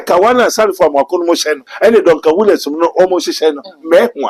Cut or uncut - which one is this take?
cut